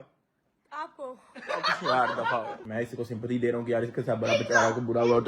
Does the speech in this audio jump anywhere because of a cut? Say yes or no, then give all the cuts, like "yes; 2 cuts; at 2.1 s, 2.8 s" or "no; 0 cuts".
yes; 1 cut; at 2.6 s